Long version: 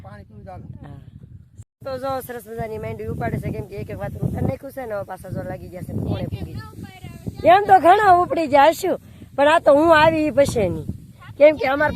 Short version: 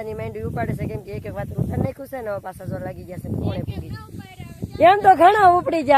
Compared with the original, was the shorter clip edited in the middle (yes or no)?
no